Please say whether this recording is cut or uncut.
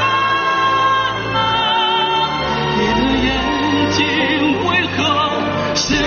uncut